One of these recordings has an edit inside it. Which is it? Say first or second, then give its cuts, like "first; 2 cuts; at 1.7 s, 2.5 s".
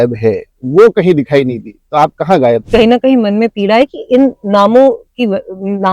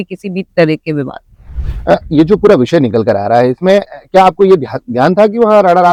first; 1 cut; at 2.6 s